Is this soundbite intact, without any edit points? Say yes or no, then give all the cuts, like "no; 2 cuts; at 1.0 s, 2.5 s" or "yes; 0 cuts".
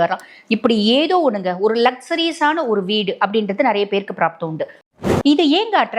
no; 1 cut; at 5.0 s